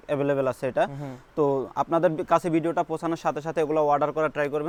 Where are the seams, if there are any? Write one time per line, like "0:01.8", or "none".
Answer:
none